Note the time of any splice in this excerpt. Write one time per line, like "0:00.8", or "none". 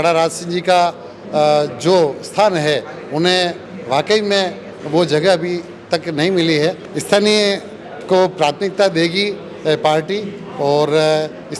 0:06.9